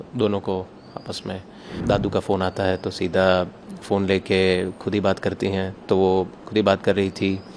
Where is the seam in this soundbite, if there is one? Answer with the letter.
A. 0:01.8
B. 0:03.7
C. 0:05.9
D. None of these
A